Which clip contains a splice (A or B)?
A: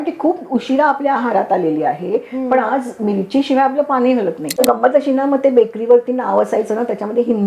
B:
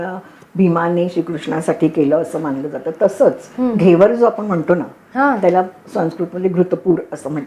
A